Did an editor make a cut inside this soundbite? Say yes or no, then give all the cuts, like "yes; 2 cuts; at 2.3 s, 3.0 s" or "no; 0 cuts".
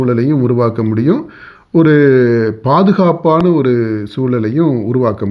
no; 0 cuts